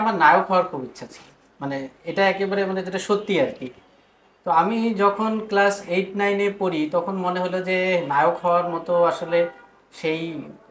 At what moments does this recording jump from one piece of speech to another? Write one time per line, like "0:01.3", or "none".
none